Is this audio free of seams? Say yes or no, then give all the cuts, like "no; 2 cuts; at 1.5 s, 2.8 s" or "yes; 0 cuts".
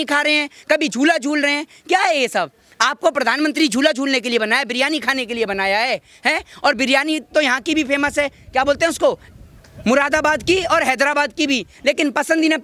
yes; 0 cuts